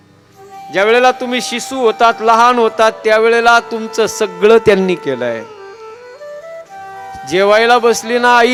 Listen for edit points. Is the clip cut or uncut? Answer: uncut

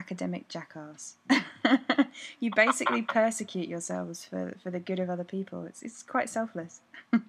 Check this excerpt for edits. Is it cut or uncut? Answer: uncut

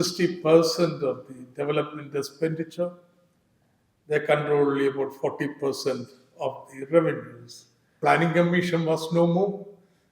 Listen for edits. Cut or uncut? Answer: cut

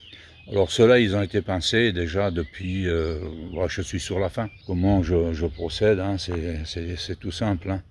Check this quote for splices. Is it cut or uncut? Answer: uncut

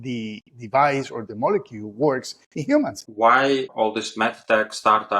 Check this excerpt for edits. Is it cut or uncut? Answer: cut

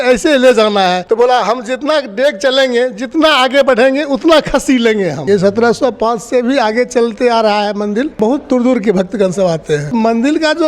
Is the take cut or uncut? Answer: cut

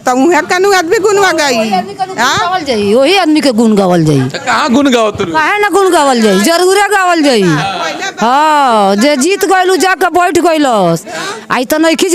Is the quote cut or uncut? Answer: uncut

